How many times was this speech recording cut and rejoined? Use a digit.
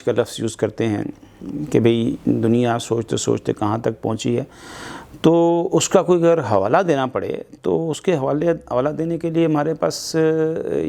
0